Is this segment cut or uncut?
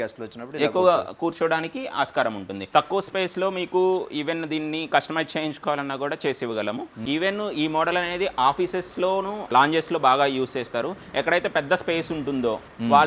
cut